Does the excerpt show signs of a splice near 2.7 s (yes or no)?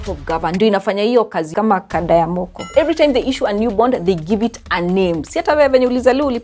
yes